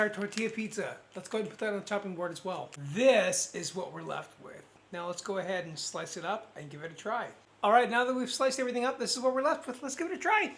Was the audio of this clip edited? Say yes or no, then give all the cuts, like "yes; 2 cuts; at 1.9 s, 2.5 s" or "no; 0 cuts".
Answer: no; 0 cuts